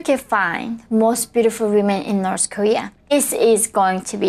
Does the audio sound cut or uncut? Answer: cut